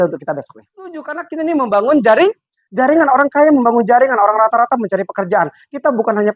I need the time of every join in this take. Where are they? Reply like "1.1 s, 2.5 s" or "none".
1.2 s